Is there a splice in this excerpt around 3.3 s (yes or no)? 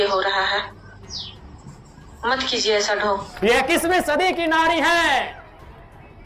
yes